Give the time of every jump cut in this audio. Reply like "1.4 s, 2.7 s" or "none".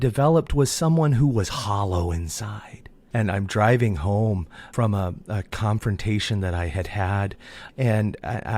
2.9 s